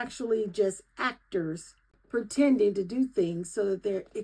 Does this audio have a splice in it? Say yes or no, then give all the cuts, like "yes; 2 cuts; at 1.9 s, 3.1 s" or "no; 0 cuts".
no; 0 cuts